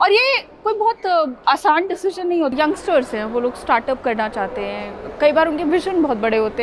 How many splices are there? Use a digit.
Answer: 1